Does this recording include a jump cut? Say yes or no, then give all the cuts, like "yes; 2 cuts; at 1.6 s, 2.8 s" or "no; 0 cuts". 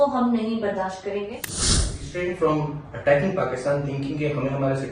yes; 1 cut; at 1.7 s